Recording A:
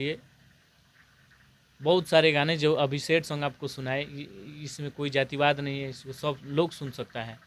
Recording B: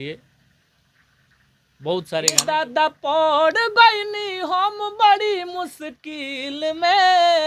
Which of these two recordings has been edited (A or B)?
B